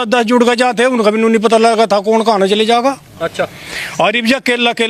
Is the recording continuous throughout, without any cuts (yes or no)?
yes